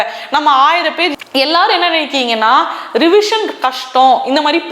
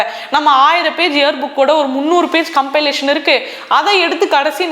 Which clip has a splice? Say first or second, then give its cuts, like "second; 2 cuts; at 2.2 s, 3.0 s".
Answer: first; 1 cut; at 1.1 s